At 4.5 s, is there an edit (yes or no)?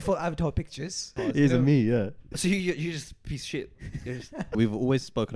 yes